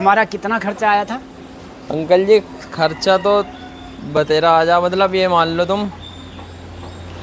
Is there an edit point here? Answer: no; 0 cuts

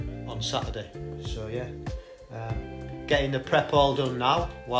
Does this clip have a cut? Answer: no; 0 cuts

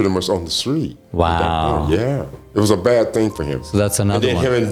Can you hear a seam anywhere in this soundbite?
no; 0 cuts

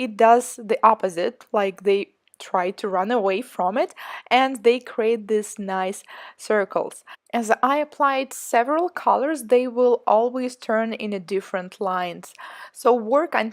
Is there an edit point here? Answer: yes; 1 cut; at 11.5 s

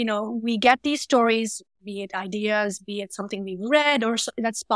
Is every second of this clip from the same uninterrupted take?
yes; 0 cuts

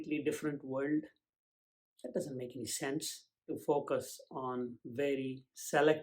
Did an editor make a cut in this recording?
yes; 1 cut; at 3.6 s

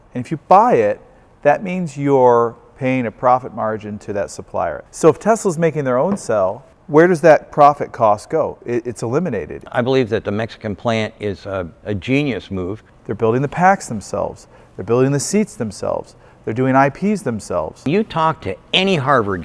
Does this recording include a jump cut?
yes; 4 cuts; at 4.8 s, 9.6 s, 12.9 s, 17.9 s

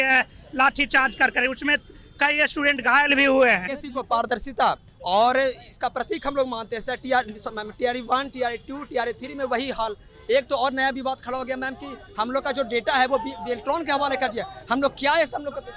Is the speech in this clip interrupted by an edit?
yes; 1 cut; at 3.8 s

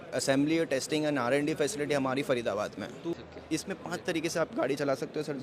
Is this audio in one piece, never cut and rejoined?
no; 1 cut; at 3.1 s

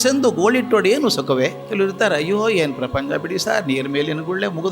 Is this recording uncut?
no; 1 cut; at 1.6 s

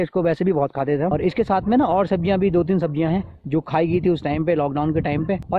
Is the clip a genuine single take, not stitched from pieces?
no; 1 cut; at 1.1 s

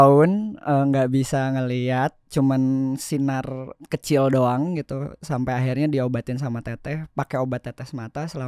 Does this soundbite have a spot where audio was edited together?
yes; 1 cut; at 3.7 s

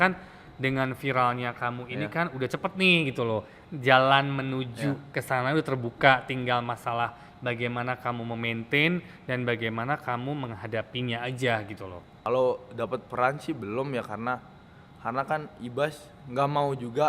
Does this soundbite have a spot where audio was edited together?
yes; 1 cut; at 12.1 s

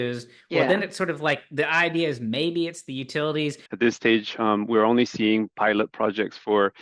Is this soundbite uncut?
no; 1 cut; at 3.6 s

